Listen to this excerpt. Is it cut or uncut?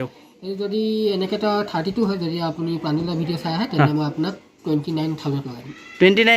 uncut